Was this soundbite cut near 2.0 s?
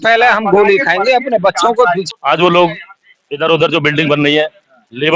yes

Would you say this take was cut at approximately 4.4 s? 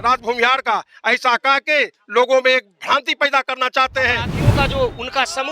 yes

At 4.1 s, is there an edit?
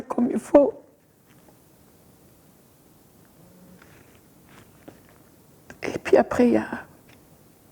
no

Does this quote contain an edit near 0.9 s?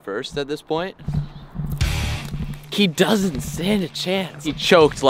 no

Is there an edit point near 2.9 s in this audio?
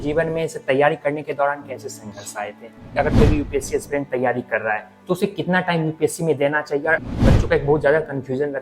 yes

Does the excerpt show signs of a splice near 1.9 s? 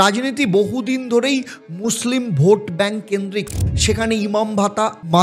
no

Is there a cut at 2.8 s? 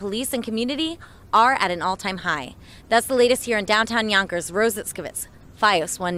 no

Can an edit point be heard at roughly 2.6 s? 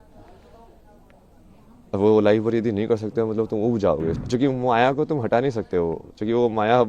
no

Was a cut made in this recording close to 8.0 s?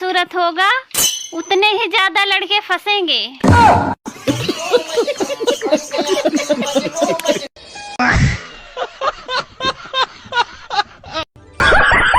yes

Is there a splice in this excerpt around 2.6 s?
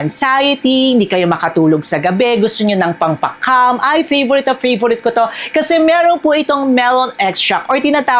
no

